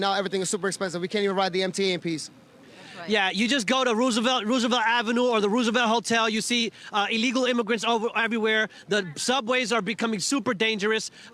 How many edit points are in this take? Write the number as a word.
zero